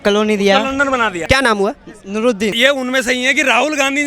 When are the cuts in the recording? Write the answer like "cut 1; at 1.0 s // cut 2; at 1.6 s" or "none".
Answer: cut 1; at 1.2 s // cut 2; at 2.6 s

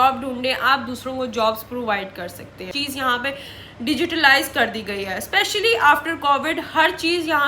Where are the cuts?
cut 1; at 2.7 s

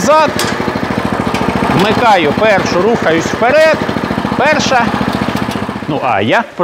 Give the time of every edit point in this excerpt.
cut 1; at 5.7 s

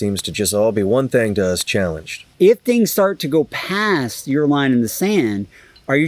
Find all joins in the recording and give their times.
cut 1; at 2.3 s

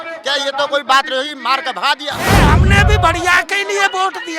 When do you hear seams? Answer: cut 1; at 2.4 s

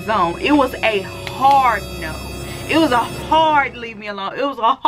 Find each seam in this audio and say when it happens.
none

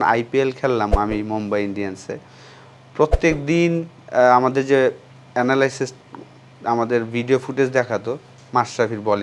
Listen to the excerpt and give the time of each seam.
none

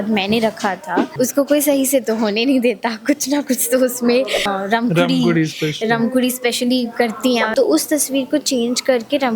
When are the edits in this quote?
cut 1; at 1.0 s // cut 2; at 4.5 s // cut 3; at 7.5 s

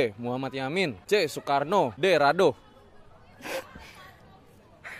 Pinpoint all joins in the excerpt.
cut 1; at 1.0 s // cut 2; at 1.9 s

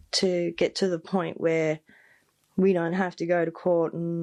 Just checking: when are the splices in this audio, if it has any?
none

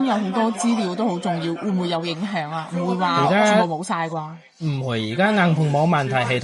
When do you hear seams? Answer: none

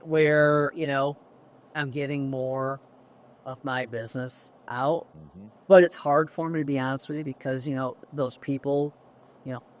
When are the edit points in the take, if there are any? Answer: none

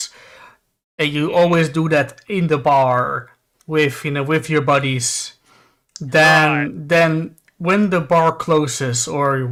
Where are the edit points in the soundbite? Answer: none

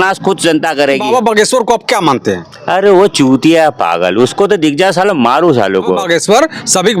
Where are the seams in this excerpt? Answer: cut 1; at 1.0 s // cut 2; at 6.0 s

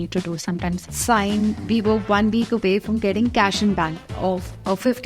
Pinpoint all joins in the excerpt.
cut 1; at 0.8 s // cut 2; at 4.0 s

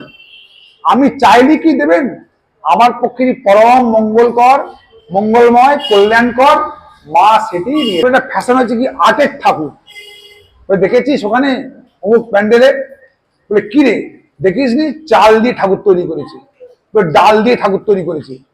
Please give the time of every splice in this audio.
cut 1; at 8.0 s

